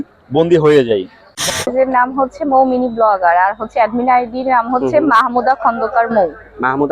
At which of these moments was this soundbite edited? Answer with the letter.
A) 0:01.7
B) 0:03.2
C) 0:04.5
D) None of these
A